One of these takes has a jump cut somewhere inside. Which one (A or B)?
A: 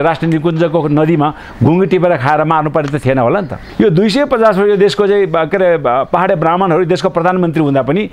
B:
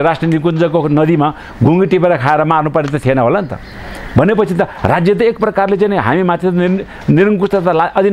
A